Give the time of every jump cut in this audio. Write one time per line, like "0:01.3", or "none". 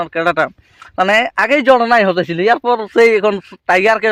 none